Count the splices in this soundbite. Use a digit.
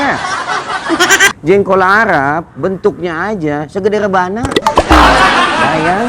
1